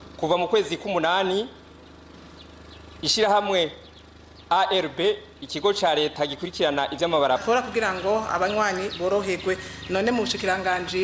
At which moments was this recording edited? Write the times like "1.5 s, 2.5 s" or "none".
7.4 s

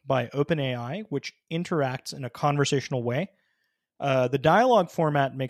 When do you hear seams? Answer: none

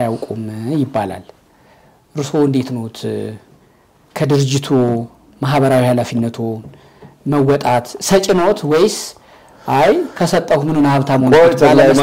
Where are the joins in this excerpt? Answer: none

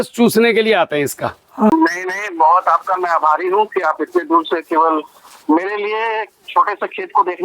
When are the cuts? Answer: 1.7 s

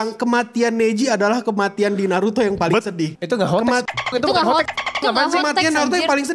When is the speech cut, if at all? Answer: 3.2 s

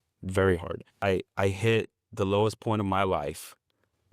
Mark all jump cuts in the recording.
1.0 s

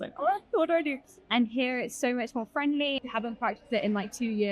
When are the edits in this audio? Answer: 1.1 s, 3.0 s

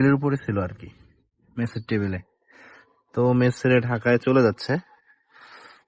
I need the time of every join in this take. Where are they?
none

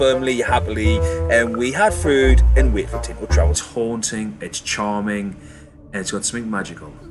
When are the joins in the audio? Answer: 3.6 s

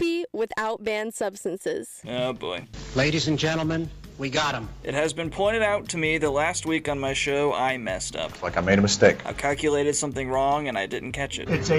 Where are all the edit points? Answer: 1.9 s

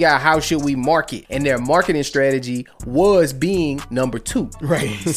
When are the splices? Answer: 1.2 s

